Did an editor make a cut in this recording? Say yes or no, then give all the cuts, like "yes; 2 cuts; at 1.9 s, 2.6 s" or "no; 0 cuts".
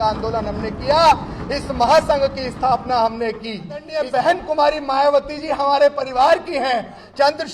yes; 1 cut; at 4.0 s